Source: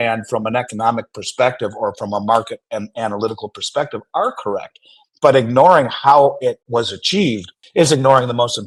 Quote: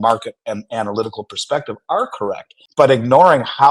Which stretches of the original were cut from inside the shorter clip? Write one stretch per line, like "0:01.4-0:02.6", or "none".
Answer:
0:04.8-0:05.0